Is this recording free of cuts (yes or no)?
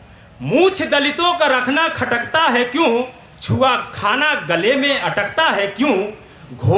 yes